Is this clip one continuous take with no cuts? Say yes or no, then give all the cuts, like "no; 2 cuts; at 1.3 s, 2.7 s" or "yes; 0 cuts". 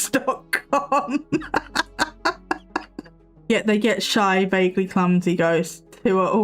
no; 1 cut; at 3.2 s